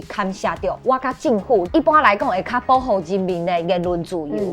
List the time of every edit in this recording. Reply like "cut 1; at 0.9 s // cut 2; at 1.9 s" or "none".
cut 1; at 1.7 s